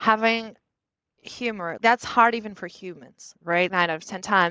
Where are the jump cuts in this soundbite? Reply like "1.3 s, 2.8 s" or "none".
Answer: 1.8 s, 3.7 s